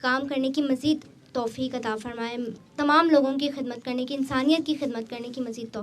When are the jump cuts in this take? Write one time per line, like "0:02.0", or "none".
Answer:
0:02.6